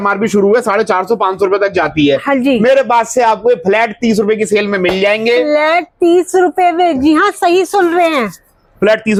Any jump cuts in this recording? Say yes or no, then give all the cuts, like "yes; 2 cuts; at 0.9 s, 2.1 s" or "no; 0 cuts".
no; 0 cuts